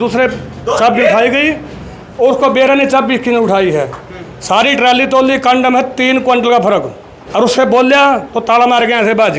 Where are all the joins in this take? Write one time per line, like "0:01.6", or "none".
0:07.1